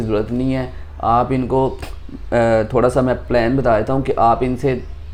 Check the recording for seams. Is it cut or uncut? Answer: uncut